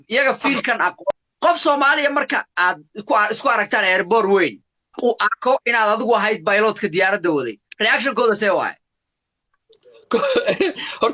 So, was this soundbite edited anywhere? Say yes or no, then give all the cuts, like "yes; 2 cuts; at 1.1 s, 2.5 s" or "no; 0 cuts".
yes; 2 cuts; at 1.1 s, 5.0 s